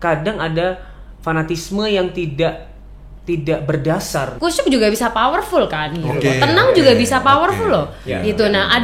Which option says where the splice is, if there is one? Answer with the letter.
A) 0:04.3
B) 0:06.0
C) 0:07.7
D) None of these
A